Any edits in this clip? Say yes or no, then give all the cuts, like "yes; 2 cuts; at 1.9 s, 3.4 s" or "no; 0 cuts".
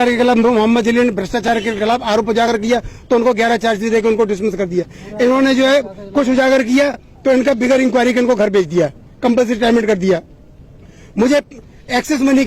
no; 0 cuts